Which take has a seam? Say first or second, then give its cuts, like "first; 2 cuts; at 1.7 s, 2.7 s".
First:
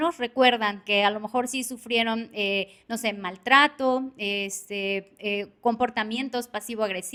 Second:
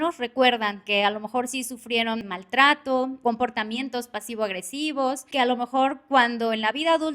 second; 3 cuts; at 2.3 s, 3.2 s, 5.2 s